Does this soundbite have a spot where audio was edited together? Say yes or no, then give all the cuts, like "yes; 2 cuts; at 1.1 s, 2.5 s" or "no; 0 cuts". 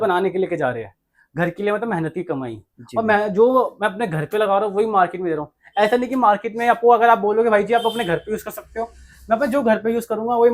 no; 0 cuts